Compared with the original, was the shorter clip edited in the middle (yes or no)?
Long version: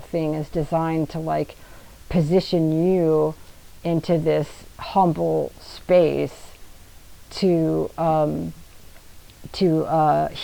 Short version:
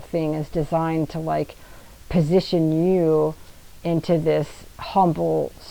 no